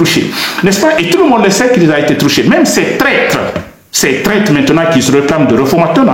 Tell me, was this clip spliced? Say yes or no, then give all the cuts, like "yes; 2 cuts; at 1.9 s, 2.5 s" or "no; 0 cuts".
no; 0 cuts